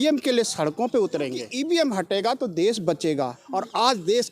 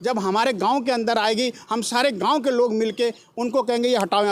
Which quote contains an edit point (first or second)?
first